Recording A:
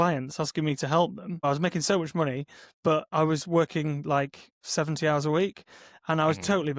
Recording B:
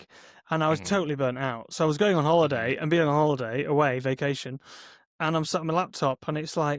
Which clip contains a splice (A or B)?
A